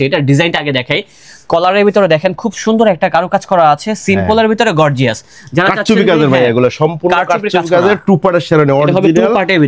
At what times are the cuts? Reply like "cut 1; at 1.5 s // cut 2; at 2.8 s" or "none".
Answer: none